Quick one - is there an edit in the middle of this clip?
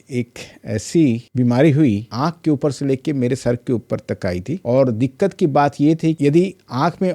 yes; 3 cuts; at 2.1 s, 4.5 s, 6.2 s

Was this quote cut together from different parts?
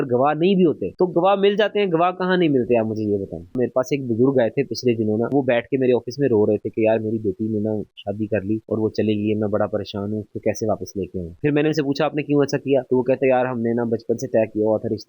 yes; 2 cuts; at 3.5 s, 5.3 s

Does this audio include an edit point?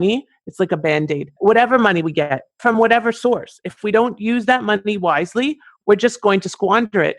yes; 2 cuts; at 1.3 s, 2.7 s

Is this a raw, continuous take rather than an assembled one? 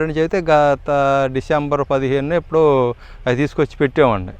yes; 0 cuts

